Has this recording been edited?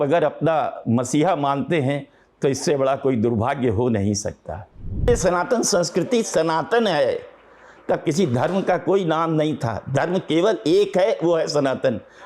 yes; 1 cut; at 5.1 s

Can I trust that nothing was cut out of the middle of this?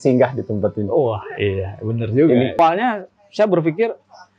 no; 1 cut; at 2.6 s

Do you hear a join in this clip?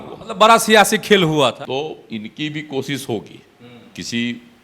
yes; 1 cut; at 1.6 s

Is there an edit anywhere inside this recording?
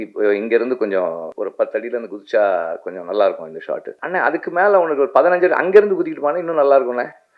yes; 2 cuts; at 1.4 s, 4.0 s

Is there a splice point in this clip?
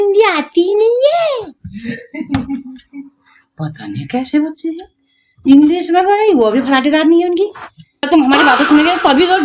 yes; 1 cut; at 8.1 s

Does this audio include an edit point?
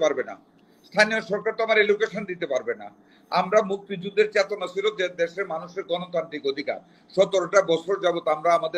no; 0 cuts

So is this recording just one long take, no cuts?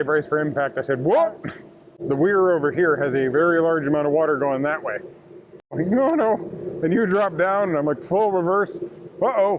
no; 2 cuts; at 1.9 s, 5.7 s

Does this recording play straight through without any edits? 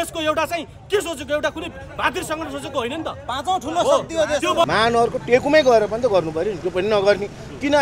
no; 1 cut; at 4.7 s

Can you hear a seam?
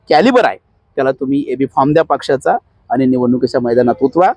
no; 0 cuts

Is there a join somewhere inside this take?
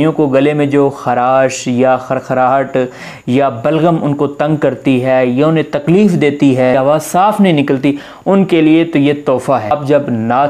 yes; 2 cuts; at 6.8 s, 9.7 s

